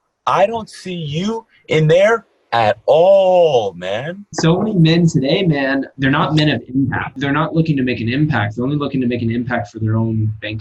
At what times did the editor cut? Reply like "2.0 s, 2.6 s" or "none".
4.2 s, 5.9 s, 7.1 s